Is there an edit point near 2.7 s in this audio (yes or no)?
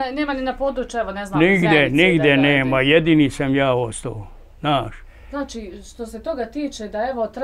no